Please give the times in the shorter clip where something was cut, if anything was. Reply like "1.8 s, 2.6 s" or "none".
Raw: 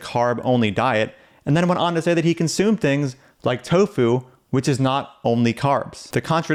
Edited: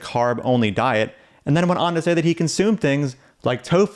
none